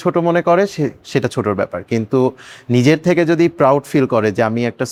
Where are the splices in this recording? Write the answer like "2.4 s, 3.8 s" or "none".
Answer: none